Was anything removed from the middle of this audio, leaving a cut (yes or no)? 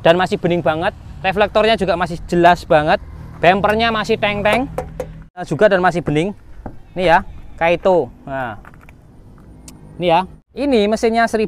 yes